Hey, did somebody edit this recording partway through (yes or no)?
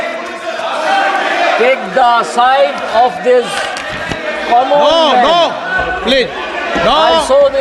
no